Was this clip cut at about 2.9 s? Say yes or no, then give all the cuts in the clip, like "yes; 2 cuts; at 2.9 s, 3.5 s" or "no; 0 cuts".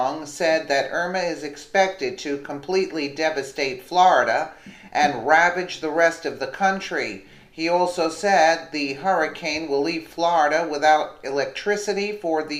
yes; 1 cut; at 2.9 s